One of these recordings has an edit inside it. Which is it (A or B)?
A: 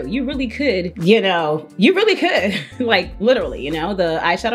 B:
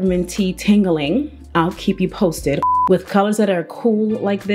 B